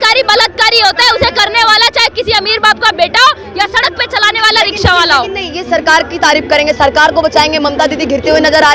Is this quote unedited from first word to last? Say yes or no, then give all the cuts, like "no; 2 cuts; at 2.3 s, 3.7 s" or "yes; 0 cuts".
yes; 0 cuts